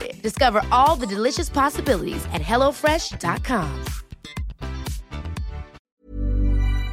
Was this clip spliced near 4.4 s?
no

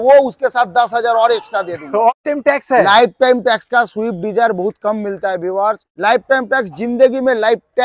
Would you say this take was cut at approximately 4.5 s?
no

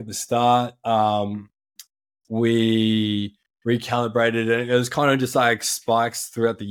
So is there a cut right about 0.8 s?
no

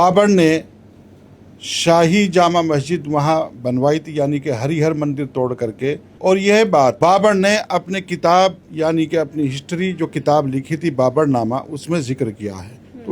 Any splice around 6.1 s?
yes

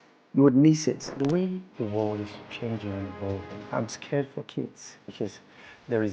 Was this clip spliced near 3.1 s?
no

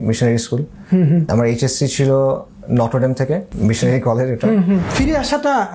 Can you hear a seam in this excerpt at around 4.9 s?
yes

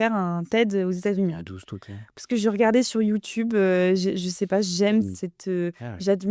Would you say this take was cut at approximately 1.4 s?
no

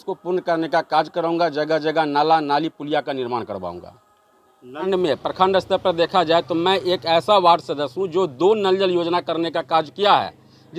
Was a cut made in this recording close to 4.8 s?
yes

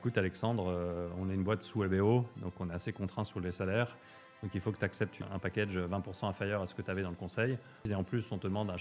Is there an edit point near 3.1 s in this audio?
no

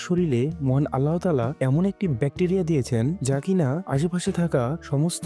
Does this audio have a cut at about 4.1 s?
no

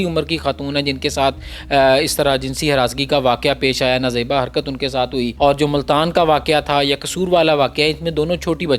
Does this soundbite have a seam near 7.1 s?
no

